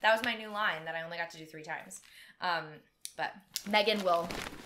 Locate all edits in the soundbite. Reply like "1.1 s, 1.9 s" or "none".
none